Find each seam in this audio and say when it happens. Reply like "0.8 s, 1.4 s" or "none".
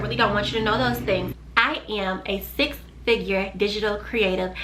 1.4 s